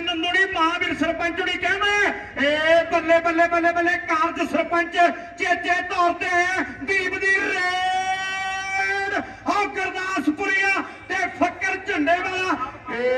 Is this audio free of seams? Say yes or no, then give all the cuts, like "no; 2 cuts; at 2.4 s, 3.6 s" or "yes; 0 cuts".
yes; 0 cuts